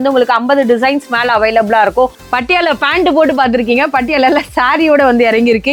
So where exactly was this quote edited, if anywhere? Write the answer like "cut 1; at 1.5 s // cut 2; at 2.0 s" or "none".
cut 1; at 2.2 s